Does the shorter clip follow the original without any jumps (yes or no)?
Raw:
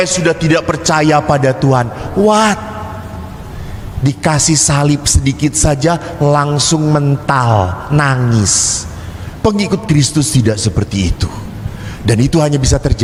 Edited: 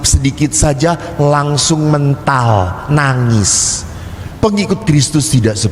yes